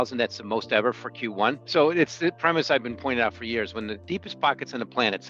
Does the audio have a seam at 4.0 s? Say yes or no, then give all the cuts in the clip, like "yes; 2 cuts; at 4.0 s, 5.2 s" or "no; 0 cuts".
yes; 2 cuts; at 1.6 s, 4.0 s